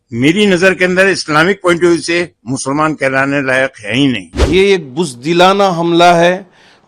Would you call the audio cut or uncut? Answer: cut